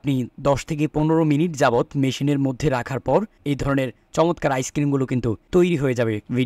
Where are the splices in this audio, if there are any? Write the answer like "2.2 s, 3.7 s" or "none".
none